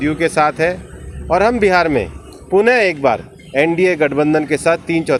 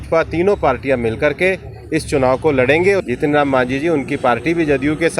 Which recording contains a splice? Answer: second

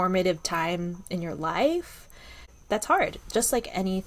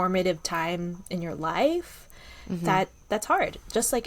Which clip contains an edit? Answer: first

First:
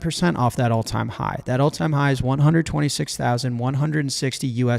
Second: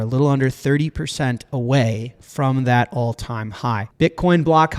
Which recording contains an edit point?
second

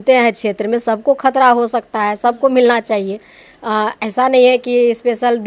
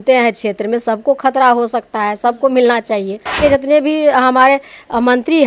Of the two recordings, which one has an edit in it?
second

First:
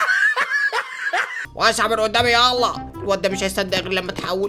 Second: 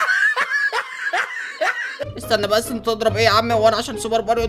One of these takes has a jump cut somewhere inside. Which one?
second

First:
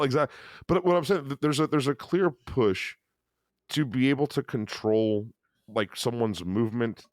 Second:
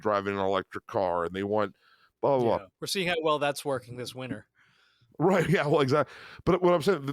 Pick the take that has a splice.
second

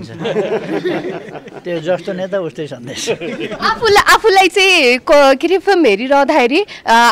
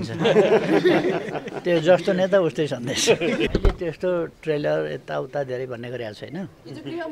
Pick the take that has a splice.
second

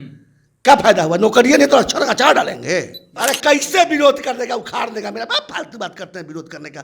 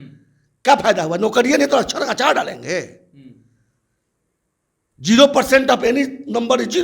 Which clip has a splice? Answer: first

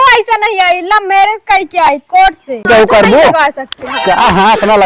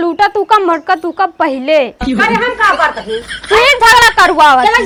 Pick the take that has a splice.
first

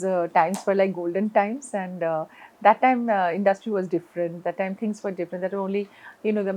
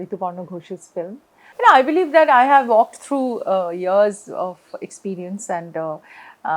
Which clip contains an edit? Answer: second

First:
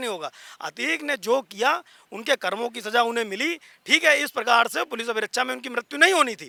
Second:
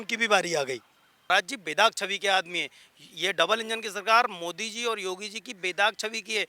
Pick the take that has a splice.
second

